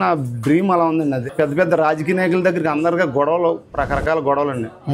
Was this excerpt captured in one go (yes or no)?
no